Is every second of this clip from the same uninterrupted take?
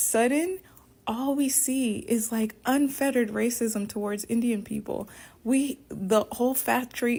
yes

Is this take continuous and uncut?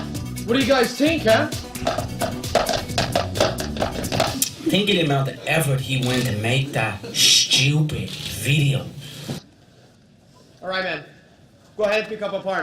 no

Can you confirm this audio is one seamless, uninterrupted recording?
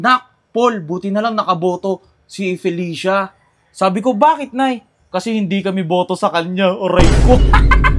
yes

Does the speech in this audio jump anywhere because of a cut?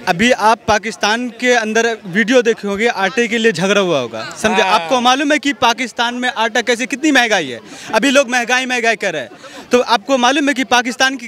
no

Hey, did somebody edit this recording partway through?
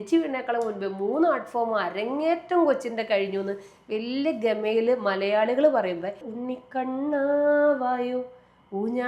yes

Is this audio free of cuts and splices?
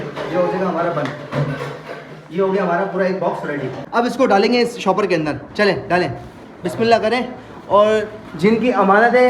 no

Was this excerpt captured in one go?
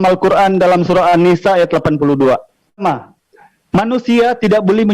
no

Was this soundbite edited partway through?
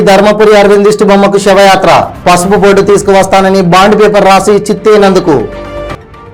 no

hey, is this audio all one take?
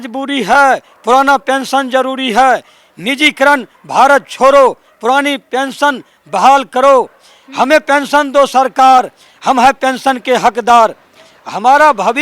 yes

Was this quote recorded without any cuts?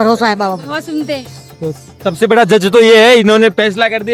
yes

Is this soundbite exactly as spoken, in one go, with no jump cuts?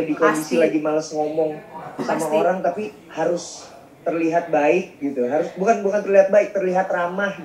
yes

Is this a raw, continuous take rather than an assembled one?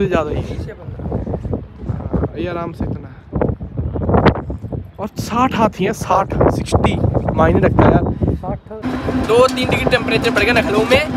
no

